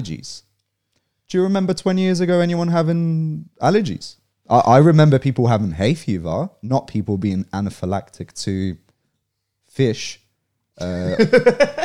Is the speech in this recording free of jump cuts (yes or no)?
yes